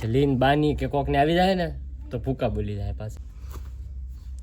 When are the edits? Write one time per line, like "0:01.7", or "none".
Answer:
0:03.1